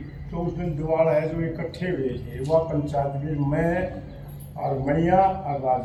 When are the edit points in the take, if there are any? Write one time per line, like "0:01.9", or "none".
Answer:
none